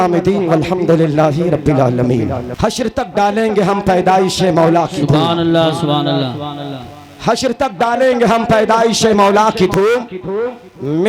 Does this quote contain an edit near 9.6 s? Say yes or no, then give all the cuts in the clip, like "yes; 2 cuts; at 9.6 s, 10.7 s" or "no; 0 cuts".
no; 1 cut; at 2.5 s